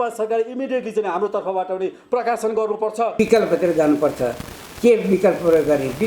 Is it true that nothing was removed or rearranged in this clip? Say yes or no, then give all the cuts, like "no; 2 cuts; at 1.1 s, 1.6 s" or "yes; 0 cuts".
no; 1 cut; at 3.1 s